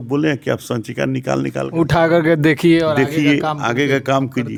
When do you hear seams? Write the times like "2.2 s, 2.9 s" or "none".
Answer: none